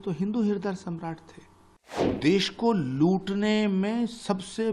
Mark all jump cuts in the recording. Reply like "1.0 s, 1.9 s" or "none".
2.2 s